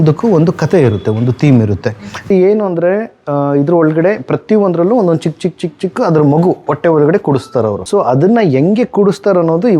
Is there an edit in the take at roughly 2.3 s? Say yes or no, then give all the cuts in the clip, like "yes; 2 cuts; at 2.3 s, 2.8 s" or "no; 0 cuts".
yes; 2 cuts; at 2.3 s, 7.8 s